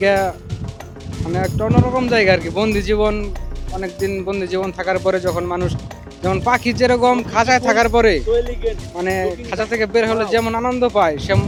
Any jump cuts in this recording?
no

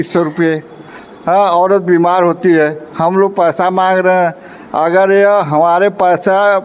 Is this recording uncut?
yes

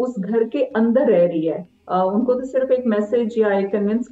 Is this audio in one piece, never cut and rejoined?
no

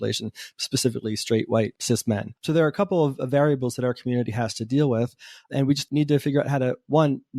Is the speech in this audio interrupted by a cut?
yes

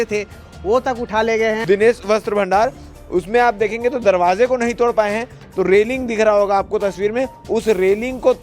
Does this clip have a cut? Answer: yes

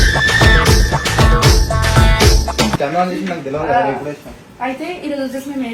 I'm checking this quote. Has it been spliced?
no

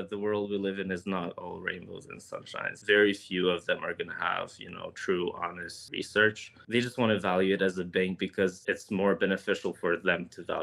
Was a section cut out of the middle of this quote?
yes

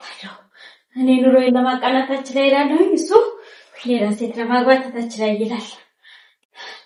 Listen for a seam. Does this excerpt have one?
no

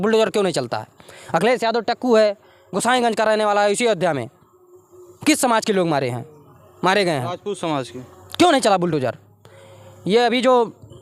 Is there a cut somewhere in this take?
no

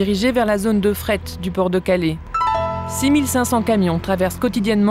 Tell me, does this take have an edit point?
yes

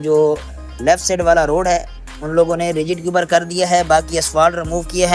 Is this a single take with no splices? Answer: yes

